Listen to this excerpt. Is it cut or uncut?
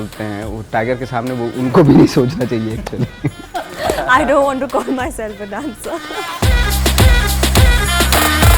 cut